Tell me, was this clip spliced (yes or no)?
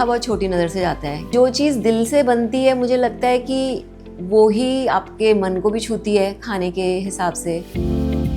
no